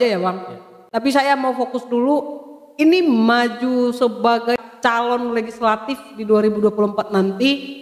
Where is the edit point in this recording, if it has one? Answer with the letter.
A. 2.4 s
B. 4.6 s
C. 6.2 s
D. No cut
B